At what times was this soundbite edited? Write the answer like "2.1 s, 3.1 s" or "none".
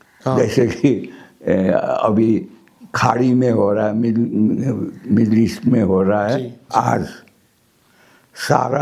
6.6 s

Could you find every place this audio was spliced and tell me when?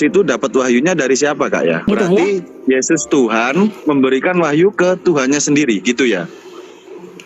1.9 s

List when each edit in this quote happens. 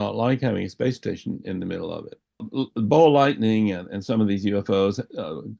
2.5 s

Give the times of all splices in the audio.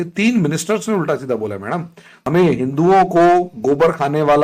2.3 s

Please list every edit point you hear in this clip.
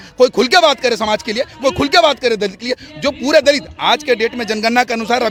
none

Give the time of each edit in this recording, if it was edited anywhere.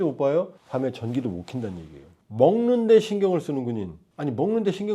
2.2 s

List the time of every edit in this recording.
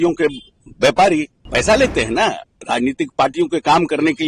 1.4 s

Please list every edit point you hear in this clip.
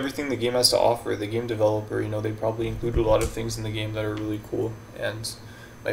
none

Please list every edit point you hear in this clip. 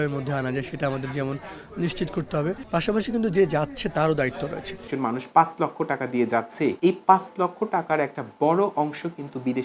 2.6 s, 4.9 s, 6.8 s

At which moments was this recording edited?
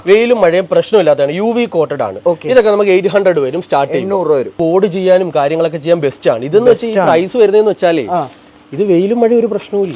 none

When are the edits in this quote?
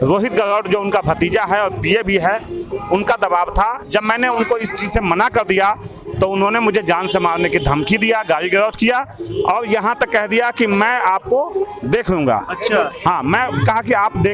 none

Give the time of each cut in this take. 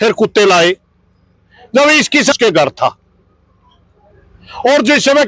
2.3 s

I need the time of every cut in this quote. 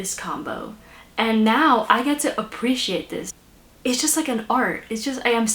3.4 s

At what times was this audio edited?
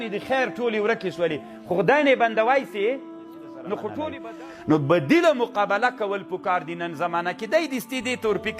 4.2 s

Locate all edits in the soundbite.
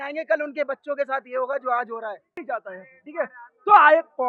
2.4 s

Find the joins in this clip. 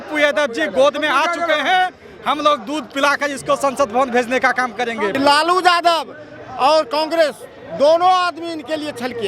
5.1 s

